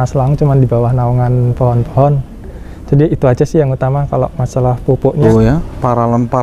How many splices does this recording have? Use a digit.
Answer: 1